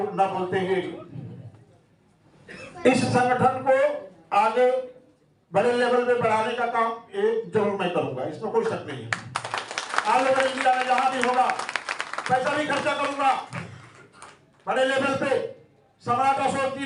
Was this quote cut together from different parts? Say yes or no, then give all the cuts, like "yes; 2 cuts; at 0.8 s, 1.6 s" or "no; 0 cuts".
no; 0 cuts